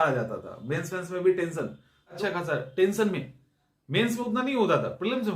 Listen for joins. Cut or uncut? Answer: cut